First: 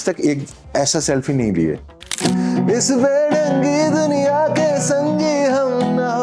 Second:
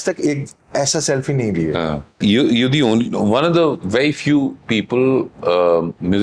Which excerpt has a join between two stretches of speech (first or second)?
first